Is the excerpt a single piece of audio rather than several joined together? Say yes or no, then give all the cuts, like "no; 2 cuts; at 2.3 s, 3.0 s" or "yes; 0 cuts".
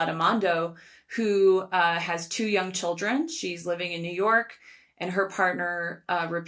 yes; 0 cuts